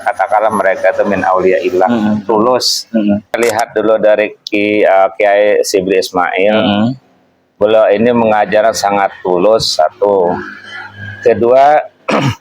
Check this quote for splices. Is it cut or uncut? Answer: cut